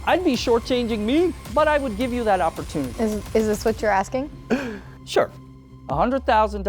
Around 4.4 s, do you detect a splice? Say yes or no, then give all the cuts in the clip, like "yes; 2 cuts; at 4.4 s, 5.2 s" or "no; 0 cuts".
no; 2 cuts; at 1.4 s, 2.9 s